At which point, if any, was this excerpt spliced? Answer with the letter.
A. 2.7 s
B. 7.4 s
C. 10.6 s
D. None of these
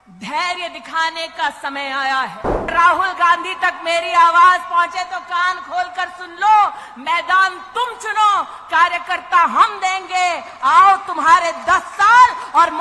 A